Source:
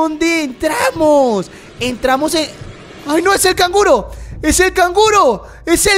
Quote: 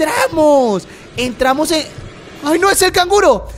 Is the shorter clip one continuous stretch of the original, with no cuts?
yes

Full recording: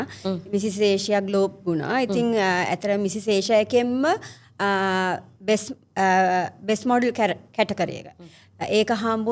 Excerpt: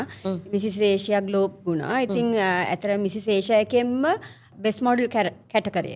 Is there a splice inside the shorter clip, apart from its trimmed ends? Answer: yes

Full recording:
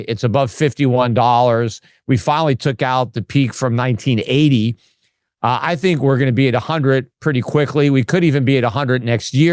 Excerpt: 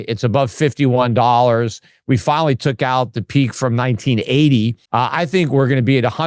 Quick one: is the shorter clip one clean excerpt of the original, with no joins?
no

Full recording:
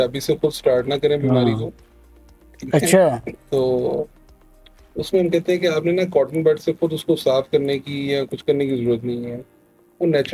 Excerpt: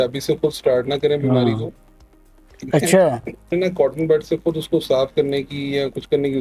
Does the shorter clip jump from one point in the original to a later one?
yes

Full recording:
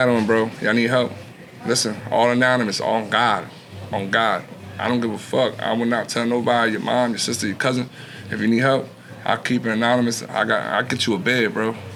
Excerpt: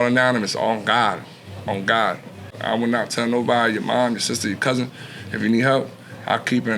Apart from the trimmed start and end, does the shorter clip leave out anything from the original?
yes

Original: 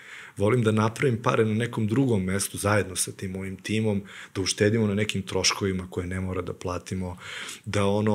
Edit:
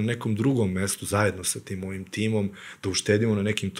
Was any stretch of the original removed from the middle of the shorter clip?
no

